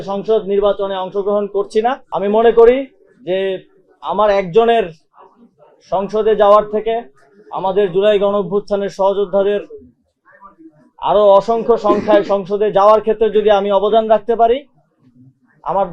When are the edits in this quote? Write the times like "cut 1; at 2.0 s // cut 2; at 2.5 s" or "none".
cut 1; at 2.0 s

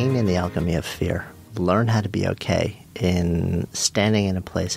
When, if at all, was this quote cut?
cut 1; at 1.4 s // cut 2; at 2.8 s

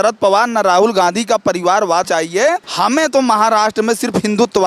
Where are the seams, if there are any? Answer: cut 1; at 2.2 s

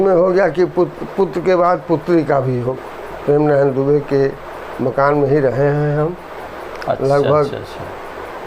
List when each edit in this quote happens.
cut 1; at 2.7 s

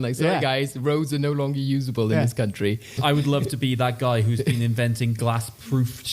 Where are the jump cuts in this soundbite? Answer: cut 1; at 2.9 s

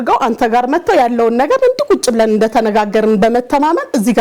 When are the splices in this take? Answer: none

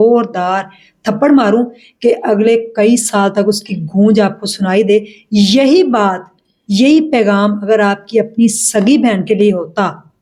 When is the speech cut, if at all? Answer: none

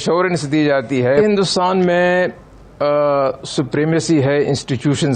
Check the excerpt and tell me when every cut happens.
cut 1; at 1.2 s

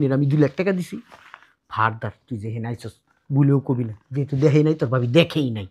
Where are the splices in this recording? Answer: none

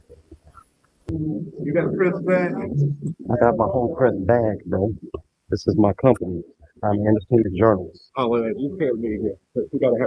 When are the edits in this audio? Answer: cut 1; at 1.0 s

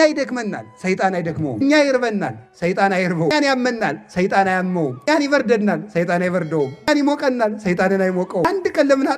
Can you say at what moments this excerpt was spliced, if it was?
cut 1; at 1.6 s // cut 2; at 3.3 s // cut 3; at 5.1 s // cut 4; at 6.9 s // cut 5; at 8.4 s

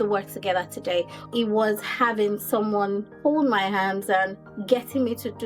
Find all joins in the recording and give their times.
cut 1; at 1.3 s // cut 2; at 3.1 s // cut 3; at 4.5 s

